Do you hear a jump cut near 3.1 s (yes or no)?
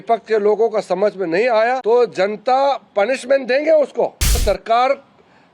no